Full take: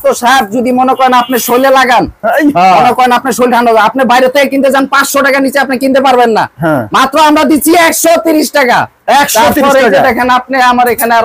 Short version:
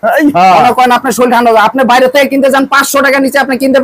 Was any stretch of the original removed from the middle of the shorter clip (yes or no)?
no